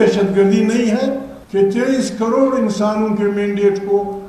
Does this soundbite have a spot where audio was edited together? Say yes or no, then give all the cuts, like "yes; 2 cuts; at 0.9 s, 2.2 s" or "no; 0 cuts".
yes; 1 cut; at 1.3 s